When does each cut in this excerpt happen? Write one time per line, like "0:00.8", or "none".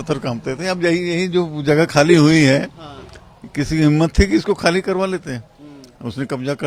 none